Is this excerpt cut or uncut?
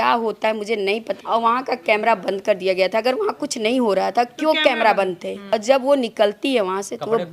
cut